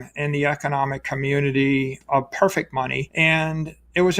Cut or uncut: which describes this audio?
cut